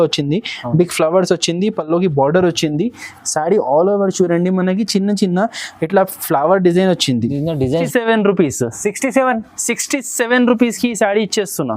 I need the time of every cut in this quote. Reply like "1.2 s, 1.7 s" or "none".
7.9 s